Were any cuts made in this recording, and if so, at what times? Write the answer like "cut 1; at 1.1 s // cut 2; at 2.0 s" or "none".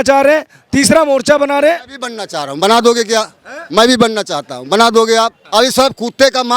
cut 1; at 5.4 s

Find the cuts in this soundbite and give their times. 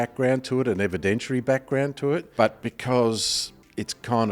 cut 1; at 2.3 s

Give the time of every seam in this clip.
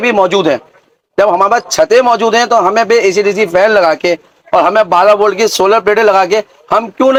none

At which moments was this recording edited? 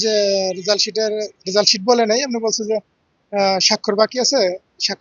none

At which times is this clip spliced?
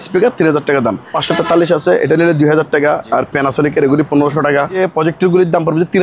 cut 1; at 1.2 s // cut 2; at 4.8 s

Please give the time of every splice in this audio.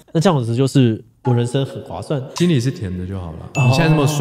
none

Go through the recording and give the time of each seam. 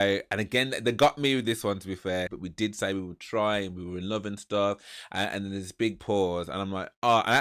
cut 1; at 2.4 s

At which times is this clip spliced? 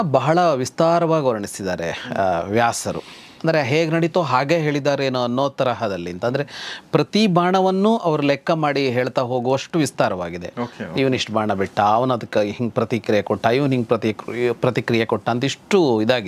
none

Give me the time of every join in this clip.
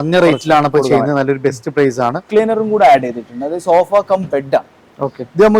cut 1; at 2.3 s

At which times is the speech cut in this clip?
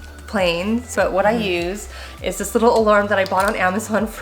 cut 1; at 0.9 s

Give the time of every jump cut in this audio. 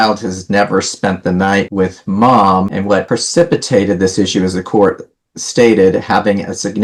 none

